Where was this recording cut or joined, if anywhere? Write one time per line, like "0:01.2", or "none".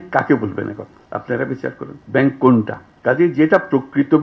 0:00.9
0:02.0
0:02.8

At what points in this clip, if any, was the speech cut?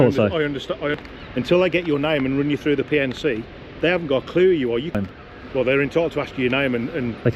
0:01.0
0:05.0

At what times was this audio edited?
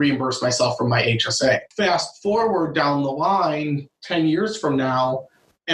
0:01.7

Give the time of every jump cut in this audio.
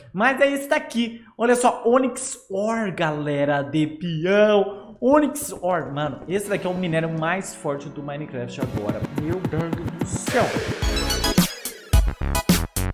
0:10.8

